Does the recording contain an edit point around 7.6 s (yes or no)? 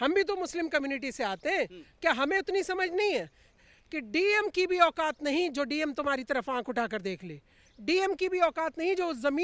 no